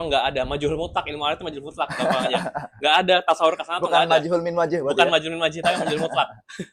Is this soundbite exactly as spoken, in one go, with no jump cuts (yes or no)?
yes